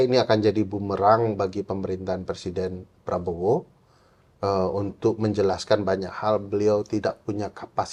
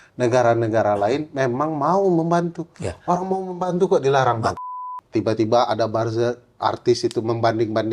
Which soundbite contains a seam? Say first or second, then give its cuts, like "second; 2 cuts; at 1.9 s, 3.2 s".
second; 1 cut; at 4.5 s